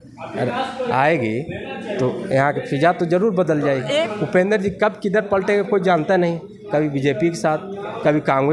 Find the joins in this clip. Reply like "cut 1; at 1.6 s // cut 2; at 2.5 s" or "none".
cut 1; at 4.1 s